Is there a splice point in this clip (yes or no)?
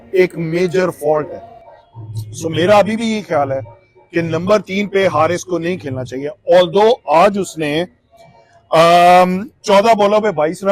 no